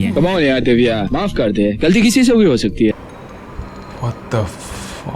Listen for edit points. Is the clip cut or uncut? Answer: cut